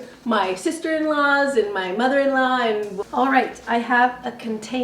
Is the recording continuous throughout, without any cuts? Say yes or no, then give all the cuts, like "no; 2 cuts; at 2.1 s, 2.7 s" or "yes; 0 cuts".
no; 1 cut; at 2.9 s